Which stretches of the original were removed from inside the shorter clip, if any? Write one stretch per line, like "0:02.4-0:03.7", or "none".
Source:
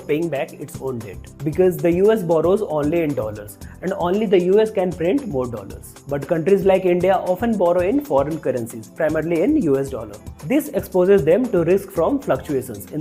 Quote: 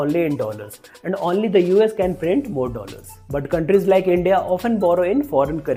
none